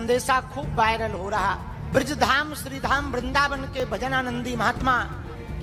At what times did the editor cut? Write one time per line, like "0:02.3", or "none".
none

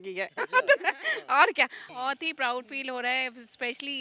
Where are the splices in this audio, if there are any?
0:01.9

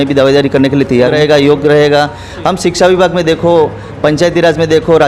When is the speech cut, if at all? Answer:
0:01.1

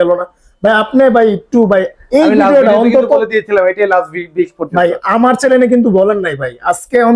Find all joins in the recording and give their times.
none

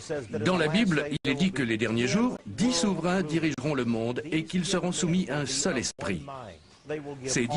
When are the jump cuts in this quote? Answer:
none

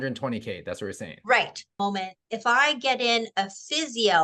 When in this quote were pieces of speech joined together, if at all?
0:01.8

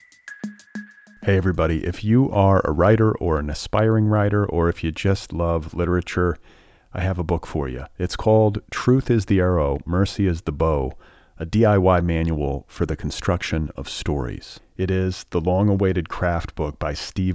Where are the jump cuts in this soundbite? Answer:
0:00.9

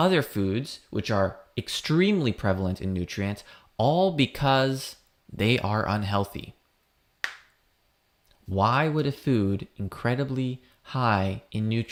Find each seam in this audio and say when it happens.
none

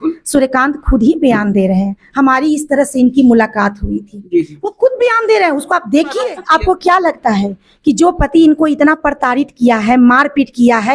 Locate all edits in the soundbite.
0:06.3

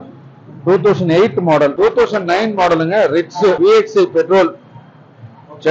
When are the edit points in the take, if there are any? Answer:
0:01.7
0:03.6

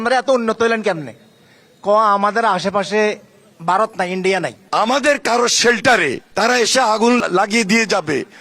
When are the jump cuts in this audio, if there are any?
0:04.6
0:06.2
0:07.2

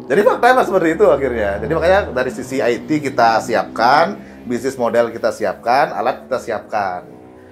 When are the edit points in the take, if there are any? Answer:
none

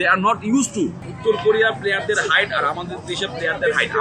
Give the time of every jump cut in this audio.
0:01.1

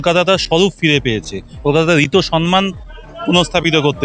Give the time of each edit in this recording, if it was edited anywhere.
none

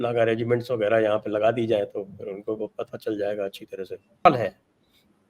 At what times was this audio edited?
0:04.3

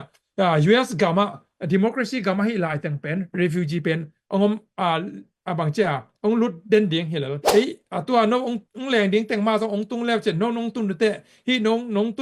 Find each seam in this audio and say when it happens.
0:07.3

